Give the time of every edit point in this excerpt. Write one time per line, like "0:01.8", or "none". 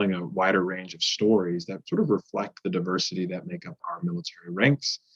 0:03.8